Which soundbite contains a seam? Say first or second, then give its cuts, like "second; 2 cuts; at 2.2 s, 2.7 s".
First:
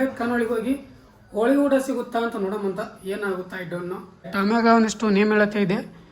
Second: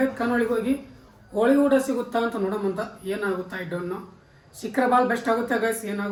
first; 1 cut; at 4.3 s